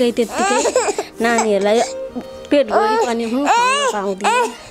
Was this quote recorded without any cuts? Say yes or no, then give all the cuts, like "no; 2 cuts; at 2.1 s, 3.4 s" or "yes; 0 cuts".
yes; 0 cuts